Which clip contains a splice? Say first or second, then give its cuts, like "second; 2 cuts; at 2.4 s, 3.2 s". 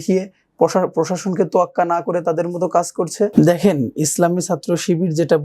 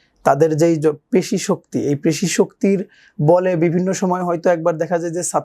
first; 1 cut; at 3.3 s